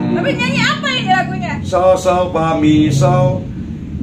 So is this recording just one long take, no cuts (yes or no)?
no